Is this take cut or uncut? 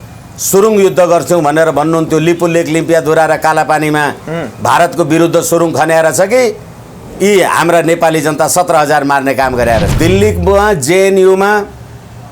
cut